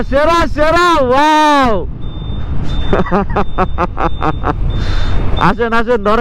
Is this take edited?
no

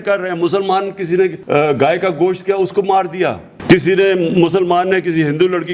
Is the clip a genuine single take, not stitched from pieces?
no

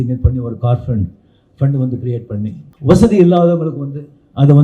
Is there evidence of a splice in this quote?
yes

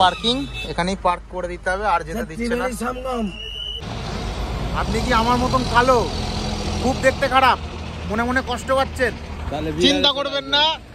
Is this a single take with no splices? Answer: no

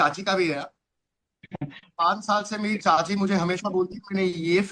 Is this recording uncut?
no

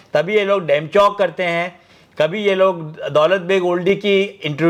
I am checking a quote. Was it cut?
no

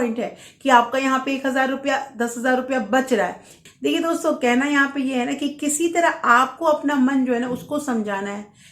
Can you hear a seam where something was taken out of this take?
yes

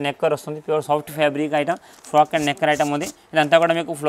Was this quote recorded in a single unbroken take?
yes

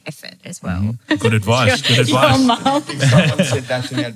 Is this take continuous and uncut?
no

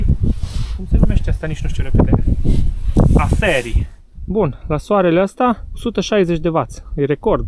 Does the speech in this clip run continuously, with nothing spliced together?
no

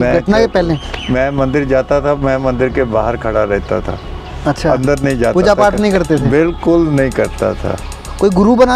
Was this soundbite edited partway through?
no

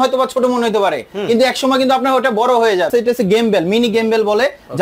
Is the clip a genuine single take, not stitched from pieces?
no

